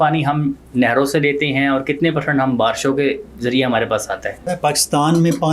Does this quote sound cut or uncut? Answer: cut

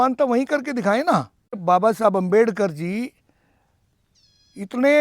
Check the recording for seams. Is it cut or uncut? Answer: cut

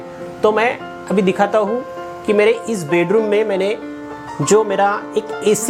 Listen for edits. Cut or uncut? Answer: uncut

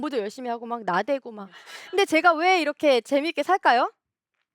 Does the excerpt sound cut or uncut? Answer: cut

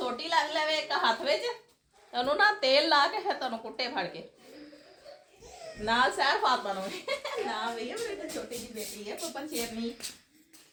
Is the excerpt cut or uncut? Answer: uncut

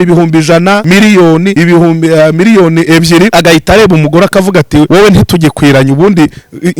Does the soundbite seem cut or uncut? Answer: cut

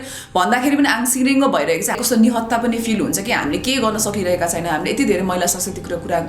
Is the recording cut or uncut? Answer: cut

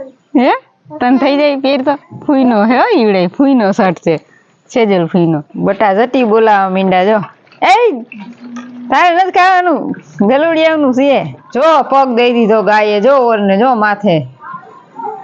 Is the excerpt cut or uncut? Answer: cut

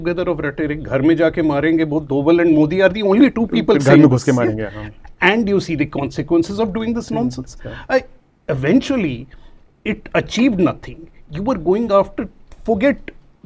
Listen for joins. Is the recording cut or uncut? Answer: uncut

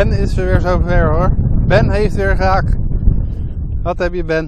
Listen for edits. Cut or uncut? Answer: uncut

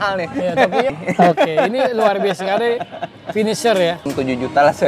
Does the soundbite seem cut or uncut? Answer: cut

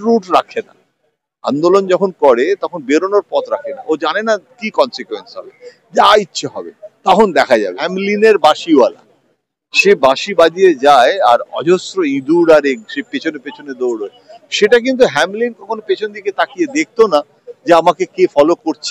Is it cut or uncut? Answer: cut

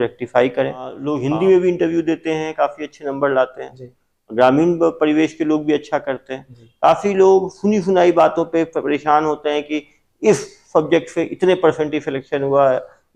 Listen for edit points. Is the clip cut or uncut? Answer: cut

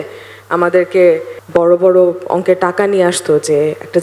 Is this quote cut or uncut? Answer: cut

